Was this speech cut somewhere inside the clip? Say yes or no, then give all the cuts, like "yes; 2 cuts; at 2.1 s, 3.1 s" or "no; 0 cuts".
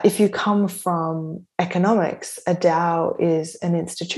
no; 0 cuts